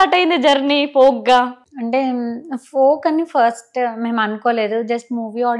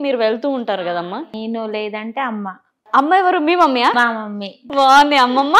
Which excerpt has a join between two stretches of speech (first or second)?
second